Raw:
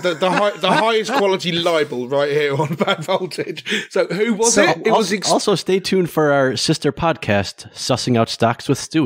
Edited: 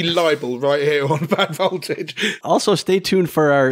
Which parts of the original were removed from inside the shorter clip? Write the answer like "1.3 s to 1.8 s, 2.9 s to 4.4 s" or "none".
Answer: 3.9 s to 5.2 s